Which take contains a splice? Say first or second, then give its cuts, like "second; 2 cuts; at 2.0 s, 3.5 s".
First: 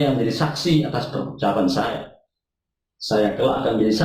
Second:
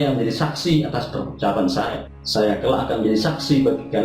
second; 1 cut; at 2.1 s